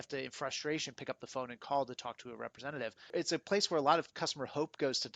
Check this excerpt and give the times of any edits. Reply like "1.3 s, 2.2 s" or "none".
3.1 s